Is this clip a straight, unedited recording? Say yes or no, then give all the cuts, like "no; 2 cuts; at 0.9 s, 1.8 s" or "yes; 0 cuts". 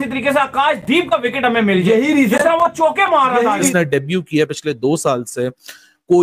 no; 1 cut; at 3.7 s